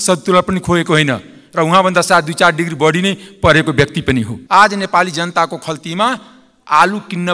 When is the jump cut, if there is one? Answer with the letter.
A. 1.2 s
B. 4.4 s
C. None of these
B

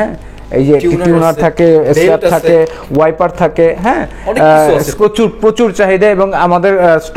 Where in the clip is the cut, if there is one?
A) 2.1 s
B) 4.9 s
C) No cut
B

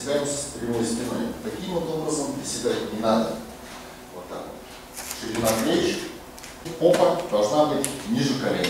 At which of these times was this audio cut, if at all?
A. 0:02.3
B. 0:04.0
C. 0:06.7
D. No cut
C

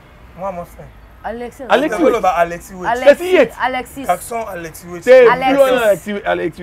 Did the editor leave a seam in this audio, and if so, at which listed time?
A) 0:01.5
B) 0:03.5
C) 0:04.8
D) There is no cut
D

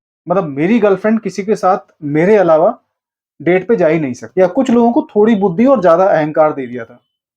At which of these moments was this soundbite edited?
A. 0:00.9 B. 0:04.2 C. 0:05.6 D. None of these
B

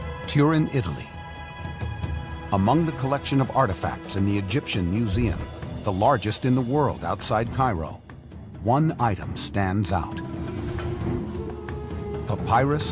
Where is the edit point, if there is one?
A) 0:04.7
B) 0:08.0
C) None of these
A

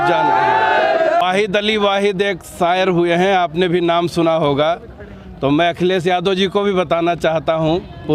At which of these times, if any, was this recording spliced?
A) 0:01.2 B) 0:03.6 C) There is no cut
A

